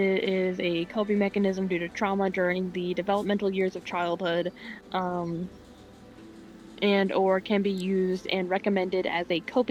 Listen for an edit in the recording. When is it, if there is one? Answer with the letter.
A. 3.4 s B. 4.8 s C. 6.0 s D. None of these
D